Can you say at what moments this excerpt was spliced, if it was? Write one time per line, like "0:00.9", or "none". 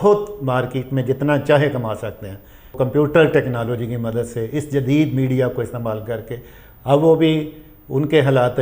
0:02.7